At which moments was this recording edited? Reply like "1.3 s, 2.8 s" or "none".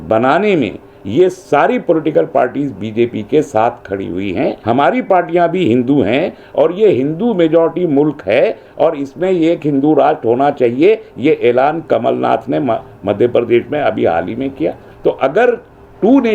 4.6 s, 14.9 s